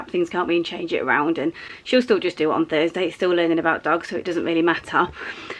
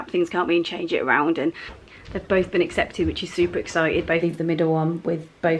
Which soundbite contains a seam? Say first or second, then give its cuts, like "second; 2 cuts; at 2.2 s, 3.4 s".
second; 2 cuts; at 1.7 s, 4.2 s